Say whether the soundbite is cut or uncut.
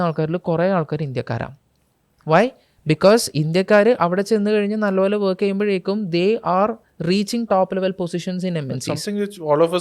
uncut